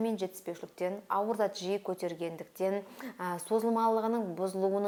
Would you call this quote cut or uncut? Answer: uncut